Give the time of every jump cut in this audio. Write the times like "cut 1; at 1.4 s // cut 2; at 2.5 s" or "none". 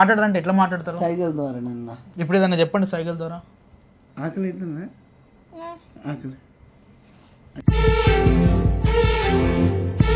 cut 1; at 7.4 s